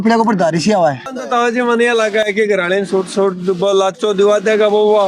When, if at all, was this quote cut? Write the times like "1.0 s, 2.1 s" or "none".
1.1 s